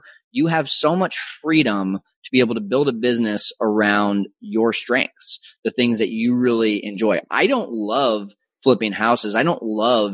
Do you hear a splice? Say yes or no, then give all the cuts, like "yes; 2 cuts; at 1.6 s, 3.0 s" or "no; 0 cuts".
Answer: no; 0 cuts